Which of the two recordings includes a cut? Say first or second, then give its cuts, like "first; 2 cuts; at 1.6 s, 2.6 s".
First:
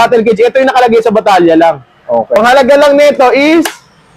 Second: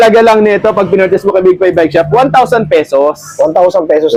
first; 1 cut; at 2.4 s